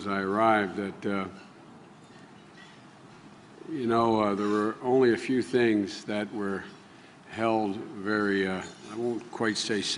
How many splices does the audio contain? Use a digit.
0